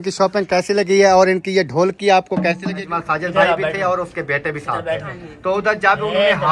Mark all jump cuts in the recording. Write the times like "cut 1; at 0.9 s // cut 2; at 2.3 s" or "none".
cut 1; at 2.9 s